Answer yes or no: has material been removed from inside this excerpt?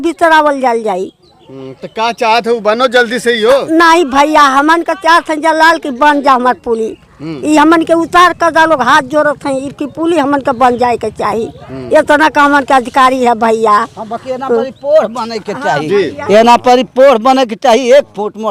no